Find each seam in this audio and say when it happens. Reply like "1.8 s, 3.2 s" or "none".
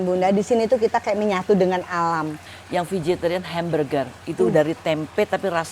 2.4 s